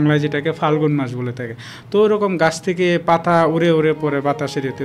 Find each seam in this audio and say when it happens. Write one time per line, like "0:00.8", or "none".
none